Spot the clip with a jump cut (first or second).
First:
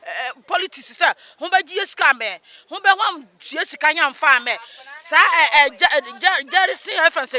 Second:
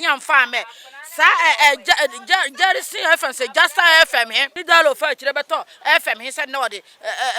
second